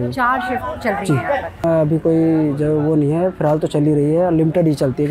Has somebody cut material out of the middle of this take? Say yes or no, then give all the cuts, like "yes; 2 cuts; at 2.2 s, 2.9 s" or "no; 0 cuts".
yes; 1 cut; at 1.6 s